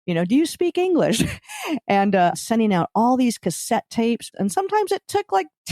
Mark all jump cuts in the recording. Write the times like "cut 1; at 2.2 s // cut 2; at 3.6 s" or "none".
cut 1; at 2.3 s // cut 2; at 4.3 s

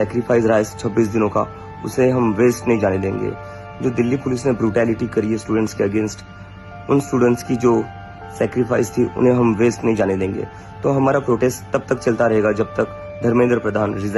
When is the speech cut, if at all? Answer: none

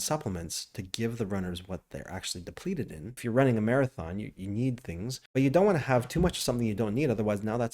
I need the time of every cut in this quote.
cut 1; at 3.2 s // cut 2; at 5.1 s

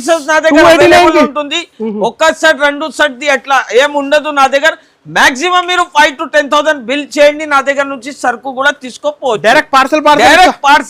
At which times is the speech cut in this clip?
none

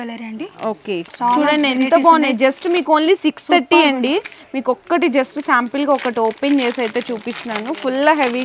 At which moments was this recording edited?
none

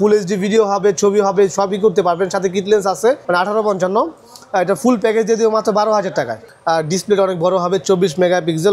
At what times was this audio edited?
cut 1; at 6.4 s

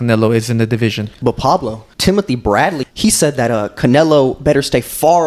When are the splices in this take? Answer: cut 1; at 1.1 s // cut 2; at 1.9 s // cut 3; at 2.9 s

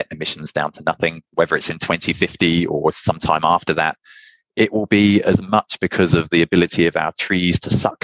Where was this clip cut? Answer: cut 1; at 1.3 s

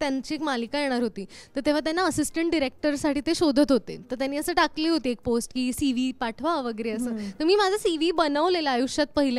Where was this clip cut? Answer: none

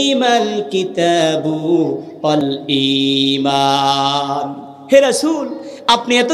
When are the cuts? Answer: cut 1; at 2.4 s

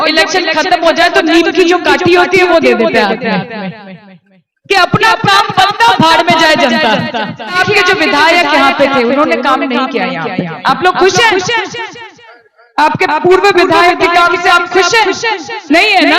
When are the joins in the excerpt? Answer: cut 1; at 7.6 s

